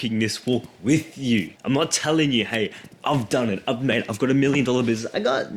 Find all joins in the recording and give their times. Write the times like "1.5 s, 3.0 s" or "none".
1.5 s